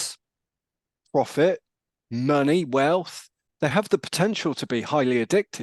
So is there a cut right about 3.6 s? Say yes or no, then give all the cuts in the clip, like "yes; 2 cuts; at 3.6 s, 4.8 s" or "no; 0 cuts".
no; 0 cuts